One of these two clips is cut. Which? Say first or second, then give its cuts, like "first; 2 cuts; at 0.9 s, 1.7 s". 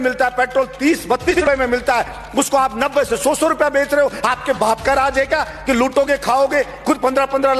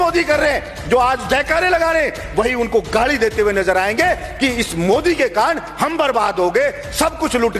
first; 1 cut; at 1.3 s